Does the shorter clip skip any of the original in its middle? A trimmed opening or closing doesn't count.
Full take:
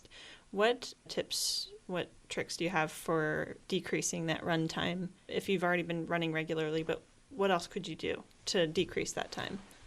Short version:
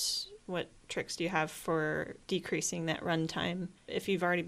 no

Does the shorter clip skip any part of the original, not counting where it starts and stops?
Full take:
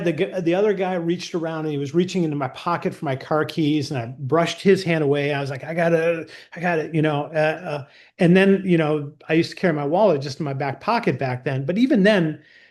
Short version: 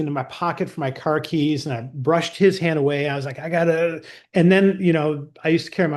yes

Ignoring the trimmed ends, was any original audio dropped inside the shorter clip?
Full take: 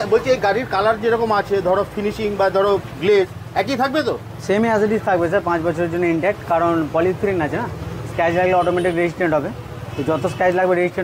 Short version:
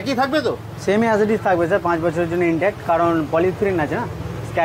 no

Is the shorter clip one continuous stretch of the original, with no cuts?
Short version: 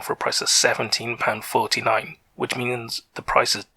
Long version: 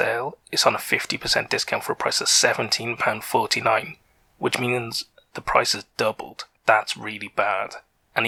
no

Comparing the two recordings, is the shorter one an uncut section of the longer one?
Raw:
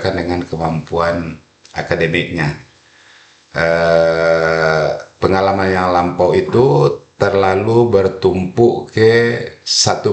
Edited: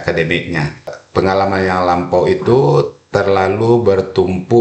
no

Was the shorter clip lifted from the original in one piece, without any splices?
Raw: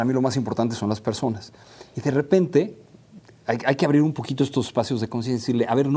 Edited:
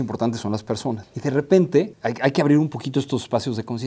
no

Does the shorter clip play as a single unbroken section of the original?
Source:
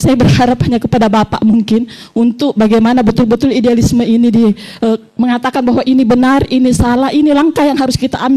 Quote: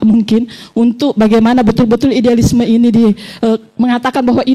yes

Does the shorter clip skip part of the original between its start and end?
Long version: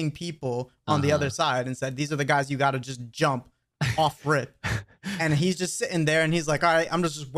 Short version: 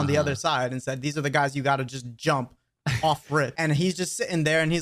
yes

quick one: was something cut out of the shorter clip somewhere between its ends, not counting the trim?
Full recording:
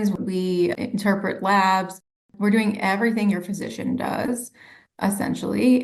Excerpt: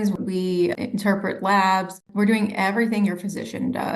yes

